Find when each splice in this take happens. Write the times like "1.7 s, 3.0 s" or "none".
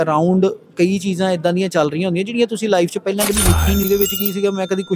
3.8 s